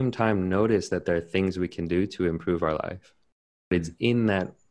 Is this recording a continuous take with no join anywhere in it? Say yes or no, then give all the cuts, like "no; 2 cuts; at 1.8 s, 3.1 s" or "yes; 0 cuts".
no; 1 cut; at 3.7 s